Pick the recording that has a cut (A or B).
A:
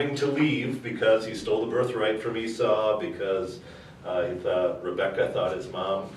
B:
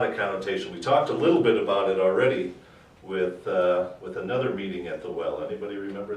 B